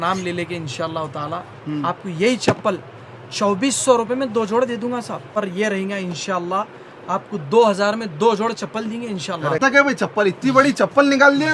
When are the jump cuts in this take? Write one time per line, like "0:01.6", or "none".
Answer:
0:05.4
0:09.6